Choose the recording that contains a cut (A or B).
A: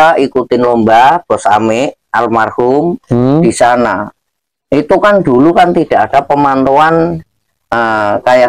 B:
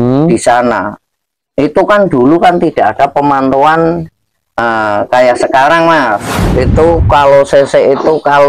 B